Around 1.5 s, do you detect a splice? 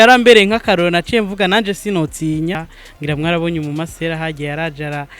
no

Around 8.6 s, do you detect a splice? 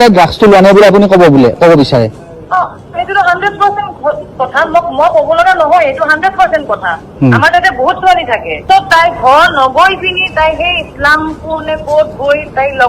yes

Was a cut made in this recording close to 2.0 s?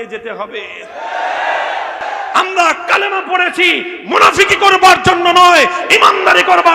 yes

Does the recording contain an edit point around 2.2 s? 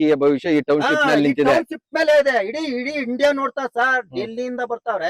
no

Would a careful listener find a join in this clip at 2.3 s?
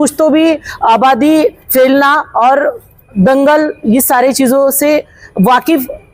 no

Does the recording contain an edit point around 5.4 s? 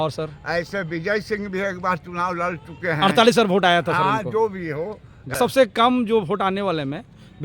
yes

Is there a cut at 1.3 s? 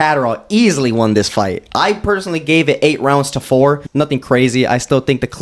no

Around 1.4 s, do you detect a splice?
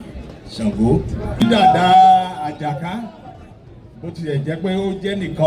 yes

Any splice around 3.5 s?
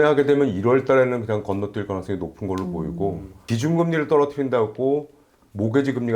yes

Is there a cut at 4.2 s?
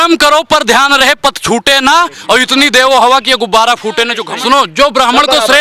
yes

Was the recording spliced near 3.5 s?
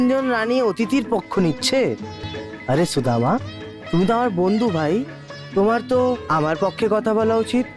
no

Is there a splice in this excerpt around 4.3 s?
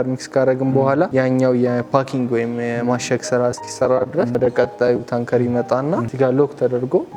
yes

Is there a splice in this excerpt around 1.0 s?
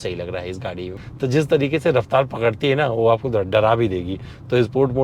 yes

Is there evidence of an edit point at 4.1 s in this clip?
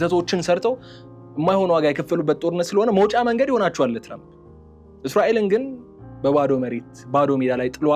no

